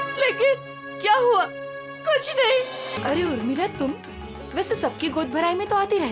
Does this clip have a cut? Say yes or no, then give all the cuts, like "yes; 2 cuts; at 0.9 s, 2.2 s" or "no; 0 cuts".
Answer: yes; 1 cut; at 3.0 s